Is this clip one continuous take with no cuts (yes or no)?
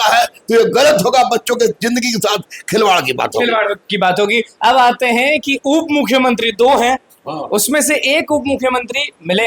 yes